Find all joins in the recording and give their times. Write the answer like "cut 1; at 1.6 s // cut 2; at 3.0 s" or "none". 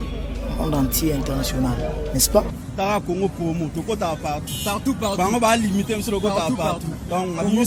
none